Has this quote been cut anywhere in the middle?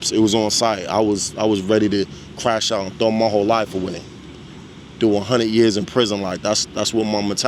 no; 0 cuts

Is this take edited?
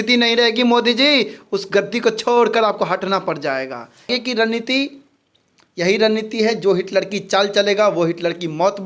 yes; 1 cut; at 4.1 s

